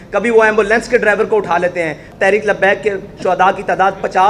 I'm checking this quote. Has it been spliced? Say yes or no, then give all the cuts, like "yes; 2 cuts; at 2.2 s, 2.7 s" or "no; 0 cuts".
yes; 1 cut; at 2.1 s